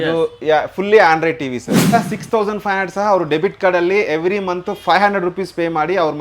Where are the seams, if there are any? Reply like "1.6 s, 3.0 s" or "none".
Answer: 1.9 s